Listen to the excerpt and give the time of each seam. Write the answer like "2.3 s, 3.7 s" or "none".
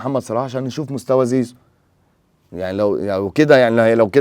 none